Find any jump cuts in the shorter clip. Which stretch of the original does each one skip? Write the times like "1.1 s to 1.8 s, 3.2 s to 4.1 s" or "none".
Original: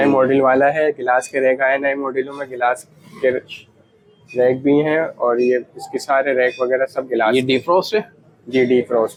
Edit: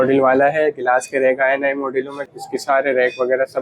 2.5 s to 5.7 s